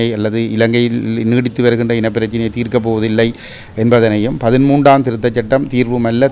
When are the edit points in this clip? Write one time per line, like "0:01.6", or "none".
none